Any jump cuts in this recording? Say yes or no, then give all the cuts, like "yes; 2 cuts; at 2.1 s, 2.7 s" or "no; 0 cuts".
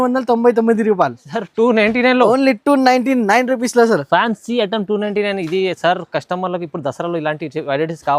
no; 0 cuts